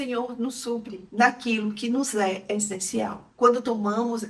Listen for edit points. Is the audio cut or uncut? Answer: uncut